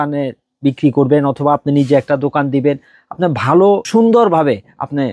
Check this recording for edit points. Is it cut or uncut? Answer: cut